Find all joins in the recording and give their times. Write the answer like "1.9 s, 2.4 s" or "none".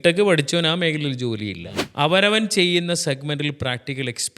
1.7 s